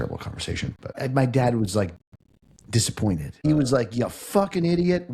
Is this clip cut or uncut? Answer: cut